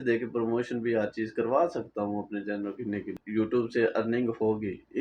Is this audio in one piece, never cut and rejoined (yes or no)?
no